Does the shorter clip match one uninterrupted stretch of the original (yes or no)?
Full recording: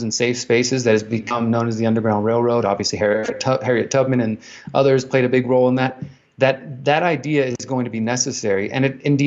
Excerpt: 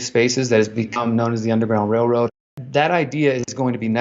no